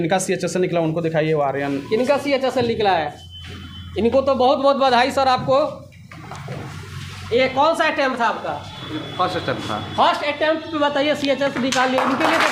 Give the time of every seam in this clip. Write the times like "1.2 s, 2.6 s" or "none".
none